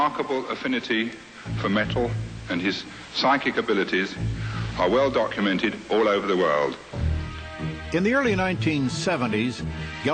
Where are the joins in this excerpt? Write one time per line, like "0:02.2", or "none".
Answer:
none